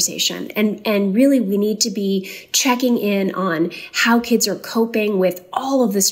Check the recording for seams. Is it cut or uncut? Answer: uncut